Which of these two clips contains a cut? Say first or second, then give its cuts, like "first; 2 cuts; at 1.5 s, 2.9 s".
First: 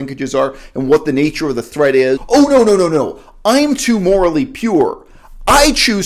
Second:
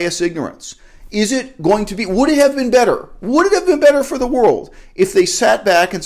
first; 1 cut; at 2.2 s